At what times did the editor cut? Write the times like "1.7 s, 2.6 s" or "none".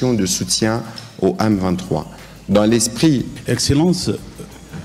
3.3 s